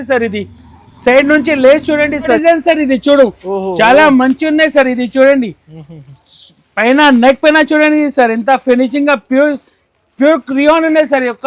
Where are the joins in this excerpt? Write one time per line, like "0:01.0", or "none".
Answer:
0:02.4